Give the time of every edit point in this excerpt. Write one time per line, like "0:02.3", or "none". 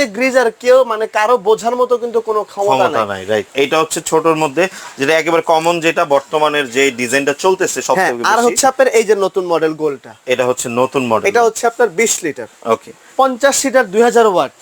0:03.5
0:13.1